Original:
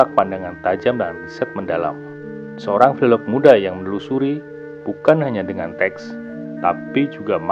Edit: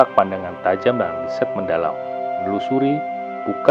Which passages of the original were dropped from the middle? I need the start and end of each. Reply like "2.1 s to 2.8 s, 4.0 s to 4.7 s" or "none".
2.5 s to 3.9 s